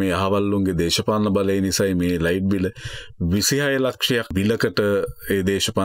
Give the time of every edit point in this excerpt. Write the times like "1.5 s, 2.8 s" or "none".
4.3 s